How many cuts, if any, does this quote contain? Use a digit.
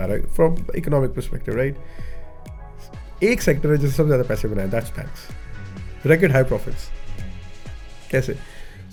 0